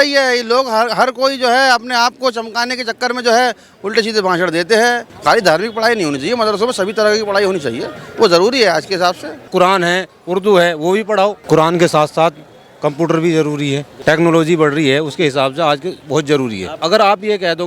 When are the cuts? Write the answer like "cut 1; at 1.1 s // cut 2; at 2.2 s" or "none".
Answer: cut 1; at 5.1 s // cut 2; at 9.5 s // cut 3; at 11.4 s // cut 4; at 13.9 s // cut 5; at 16.7 s